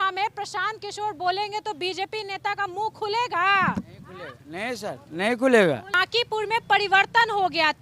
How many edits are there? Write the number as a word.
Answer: one